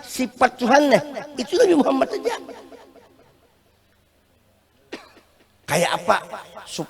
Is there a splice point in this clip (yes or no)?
no